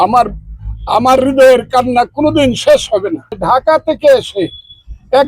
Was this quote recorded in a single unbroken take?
no; 1 cut; at 3.4 s

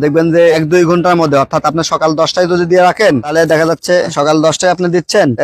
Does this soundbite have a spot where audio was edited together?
no; 0 cuts

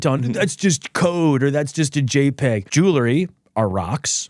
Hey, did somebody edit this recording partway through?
yes; 1 cut; at 2.7 s

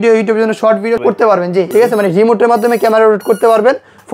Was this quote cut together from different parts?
yes; 1 cut; at 1.0 s

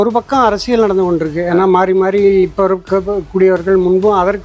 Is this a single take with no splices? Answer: yes; 0 cuts

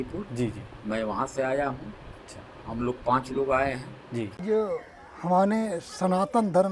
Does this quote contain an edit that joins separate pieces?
yes; 1 cut; at 4.4 s

